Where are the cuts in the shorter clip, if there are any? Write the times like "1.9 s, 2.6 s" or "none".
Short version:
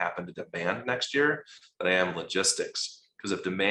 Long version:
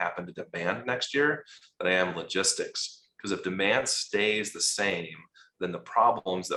none